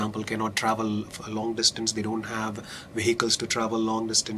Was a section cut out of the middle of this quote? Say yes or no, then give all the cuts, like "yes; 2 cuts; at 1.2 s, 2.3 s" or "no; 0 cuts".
no; 0 cuts